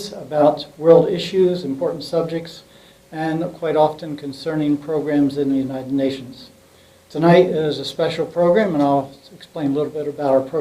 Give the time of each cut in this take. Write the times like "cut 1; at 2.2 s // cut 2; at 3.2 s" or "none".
cut 1; at 6.9 s